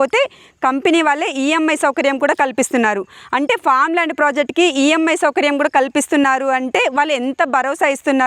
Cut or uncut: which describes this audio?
uncut